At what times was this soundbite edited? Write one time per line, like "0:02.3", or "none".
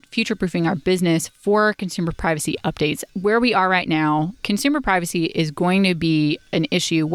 0:03.0
0:04.4